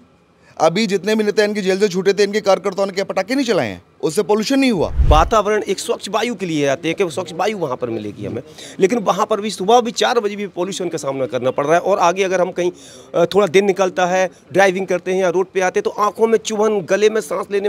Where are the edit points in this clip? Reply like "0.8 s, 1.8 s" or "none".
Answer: 5.0 s